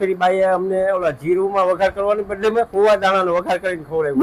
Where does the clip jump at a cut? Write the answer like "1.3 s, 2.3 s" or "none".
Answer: none